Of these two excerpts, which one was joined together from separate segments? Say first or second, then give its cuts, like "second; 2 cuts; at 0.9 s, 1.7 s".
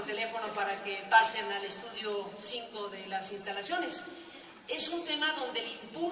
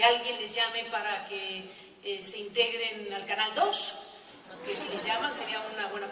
first; 1 cut; at 3.6 s